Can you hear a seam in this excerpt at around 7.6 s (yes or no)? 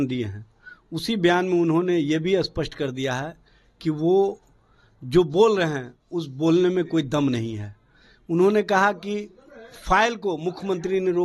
no